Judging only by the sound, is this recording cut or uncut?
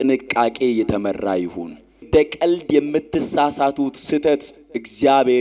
cut